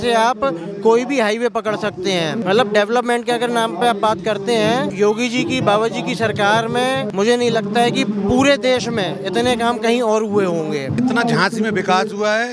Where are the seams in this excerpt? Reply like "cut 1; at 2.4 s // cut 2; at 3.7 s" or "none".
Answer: cut 1; at 2.4 s // cut 2; at 4.9 s // cut 3; at 7.1 s // cut 4; at 10.9 s